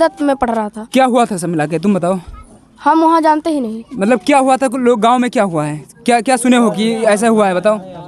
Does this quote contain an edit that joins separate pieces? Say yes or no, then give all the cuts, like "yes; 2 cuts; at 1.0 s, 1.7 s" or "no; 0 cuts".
no; 0 cuts